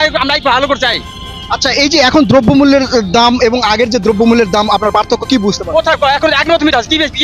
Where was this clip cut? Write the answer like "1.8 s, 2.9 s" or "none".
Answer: none